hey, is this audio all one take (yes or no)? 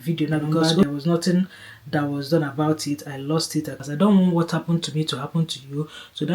no